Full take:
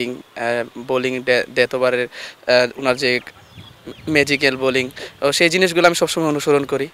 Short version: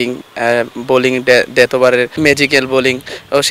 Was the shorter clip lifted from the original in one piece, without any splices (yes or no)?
no